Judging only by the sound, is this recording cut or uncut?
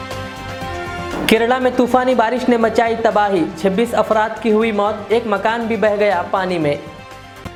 uncut